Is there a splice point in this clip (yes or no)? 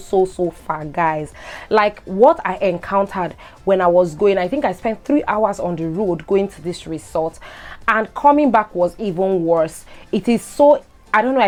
no